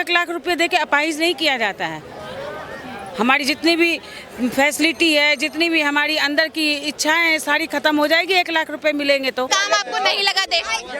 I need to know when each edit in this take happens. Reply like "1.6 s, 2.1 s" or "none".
9.5 s